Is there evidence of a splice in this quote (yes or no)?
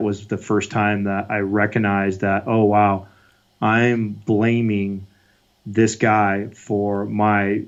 no